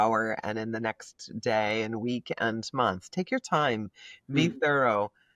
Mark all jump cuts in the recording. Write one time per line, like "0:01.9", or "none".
none